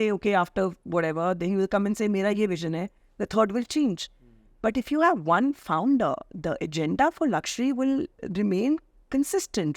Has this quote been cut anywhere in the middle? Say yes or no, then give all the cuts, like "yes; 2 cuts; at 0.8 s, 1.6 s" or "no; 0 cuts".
no; 0 cuts